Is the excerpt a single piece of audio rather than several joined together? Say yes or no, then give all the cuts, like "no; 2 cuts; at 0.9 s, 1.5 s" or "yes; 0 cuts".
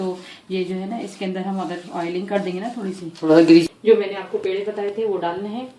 no; 1 cut; at 3.7 s